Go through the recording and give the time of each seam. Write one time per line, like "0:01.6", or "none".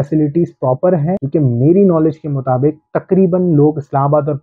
none